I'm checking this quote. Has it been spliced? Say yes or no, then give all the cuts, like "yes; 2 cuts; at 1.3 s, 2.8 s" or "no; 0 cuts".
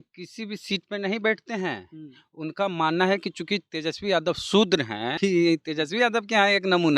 yes; 1 cut; at 5.2 s